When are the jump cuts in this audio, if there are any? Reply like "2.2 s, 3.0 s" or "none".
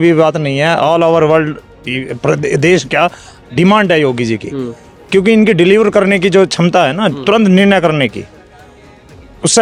none